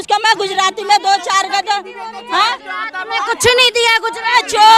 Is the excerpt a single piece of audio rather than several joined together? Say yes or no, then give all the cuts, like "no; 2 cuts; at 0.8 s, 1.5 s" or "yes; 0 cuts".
yes; 0 cuts